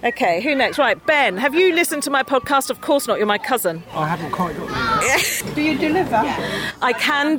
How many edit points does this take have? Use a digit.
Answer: 1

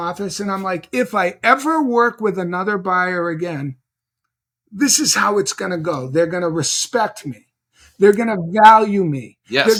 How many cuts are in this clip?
0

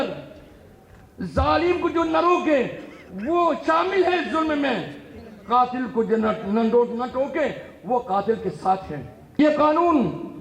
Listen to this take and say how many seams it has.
1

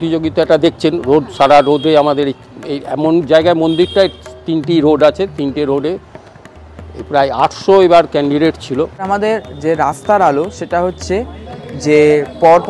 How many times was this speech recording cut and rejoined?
1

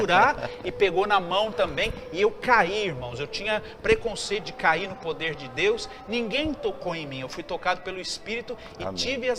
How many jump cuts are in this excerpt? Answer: 0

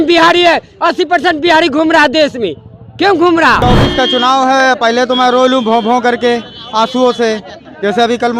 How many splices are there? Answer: 1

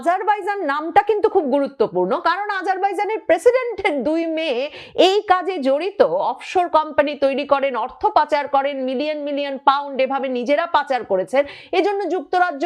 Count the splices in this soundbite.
0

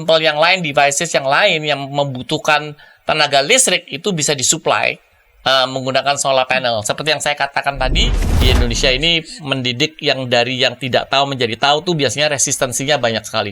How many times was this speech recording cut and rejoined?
1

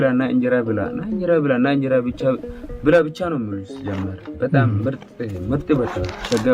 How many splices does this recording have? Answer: 0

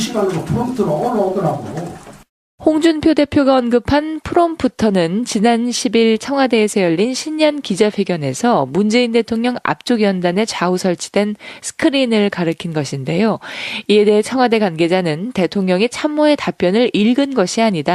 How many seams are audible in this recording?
1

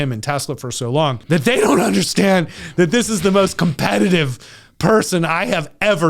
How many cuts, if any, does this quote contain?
1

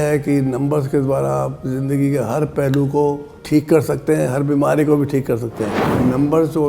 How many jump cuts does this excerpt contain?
1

